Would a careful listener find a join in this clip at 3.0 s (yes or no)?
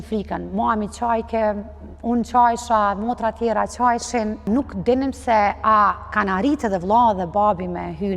no